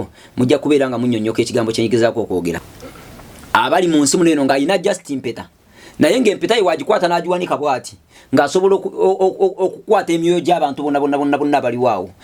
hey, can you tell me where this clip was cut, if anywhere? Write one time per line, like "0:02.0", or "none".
none